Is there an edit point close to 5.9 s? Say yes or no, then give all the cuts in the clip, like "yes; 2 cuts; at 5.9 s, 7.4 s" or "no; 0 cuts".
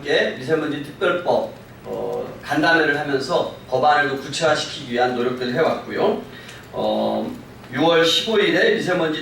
yes; 1 cut; at 5.9 s